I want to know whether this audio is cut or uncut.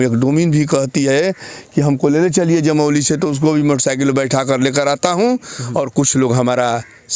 uncut